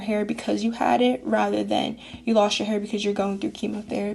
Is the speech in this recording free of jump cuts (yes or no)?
yes